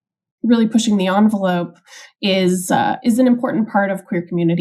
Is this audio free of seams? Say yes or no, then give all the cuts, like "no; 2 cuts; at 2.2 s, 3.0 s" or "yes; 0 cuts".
yes; 0 cuts